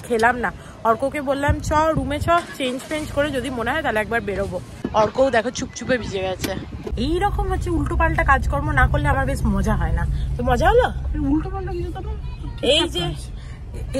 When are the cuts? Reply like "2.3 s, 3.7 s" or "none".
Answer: none